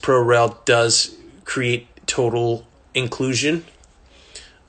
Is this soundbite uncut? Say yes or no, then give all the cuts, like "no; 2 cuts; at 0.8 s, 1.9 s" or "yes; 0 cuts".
yes; 0 cuts